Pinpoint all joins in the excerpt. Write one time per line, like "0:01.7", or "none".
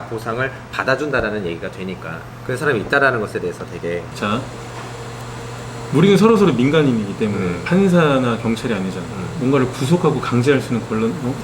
0:04.0